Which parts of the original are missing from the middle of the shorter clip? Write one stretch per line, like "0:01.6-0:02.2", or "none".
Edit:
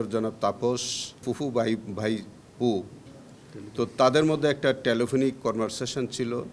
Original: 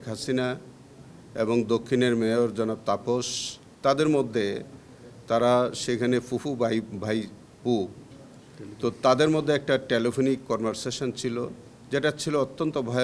0:03.7-0:06.3